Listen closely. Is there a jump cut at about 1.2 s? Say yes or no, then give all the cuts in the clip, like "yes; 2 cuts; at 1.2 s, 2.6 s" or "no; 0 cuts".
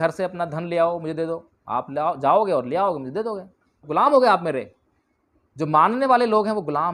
no; 1 cut; at 3.8 s